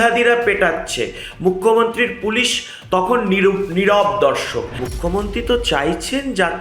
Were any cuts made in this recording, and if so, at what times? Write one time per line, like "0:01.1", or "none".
0:04.8